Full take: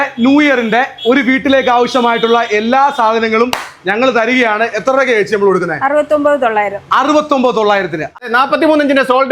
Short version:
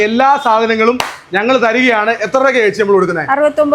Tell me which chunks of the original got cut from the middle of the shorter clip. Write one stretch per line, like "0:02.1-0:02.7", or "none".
none